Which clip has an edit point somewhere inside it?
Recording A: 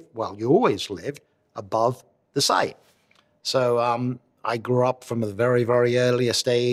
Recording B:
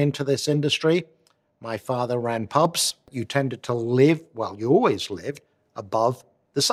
B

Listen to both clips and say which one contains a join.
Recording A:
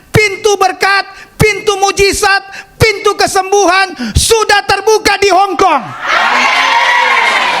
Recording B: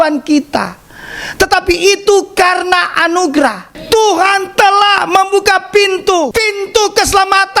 B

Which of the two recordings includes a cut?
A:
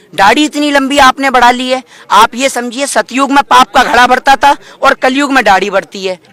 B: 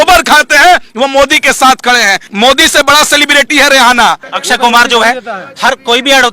B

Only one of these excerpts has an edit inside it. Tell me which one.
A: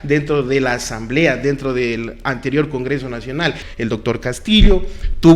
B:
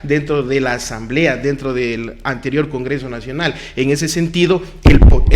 A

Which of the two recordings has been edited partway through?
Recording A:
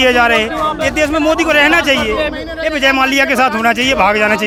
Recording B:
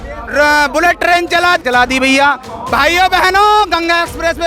B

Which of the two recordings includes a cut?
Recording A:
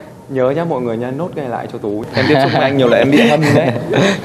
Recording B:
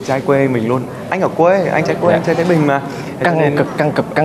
A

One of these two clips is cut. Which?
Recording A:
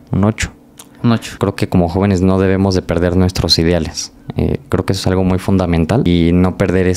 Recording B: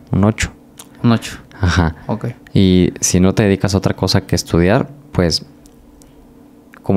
A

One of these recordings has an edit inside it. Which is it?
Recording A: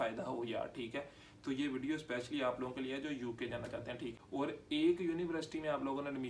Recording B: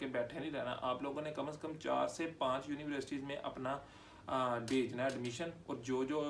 A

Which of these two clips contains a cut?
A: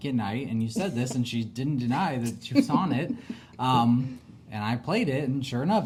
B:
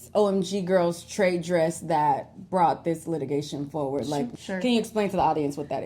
B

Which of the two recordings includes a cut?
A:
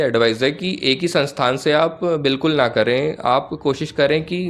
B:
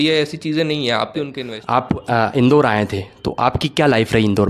B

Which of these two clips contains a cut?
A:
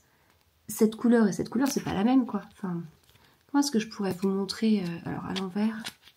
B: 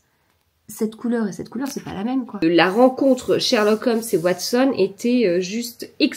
B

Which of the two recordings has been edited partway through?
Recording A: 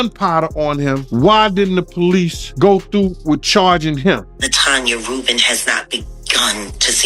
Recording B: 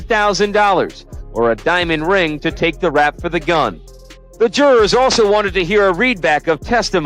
A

